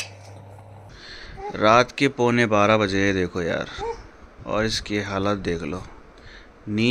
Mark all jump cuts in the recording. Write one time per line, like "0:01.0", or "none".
0:01.0